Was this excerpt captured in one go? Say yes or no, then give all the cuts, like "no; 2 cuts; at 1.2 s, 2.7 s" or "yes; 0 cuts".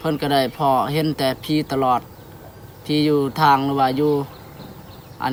yes; 0 cuts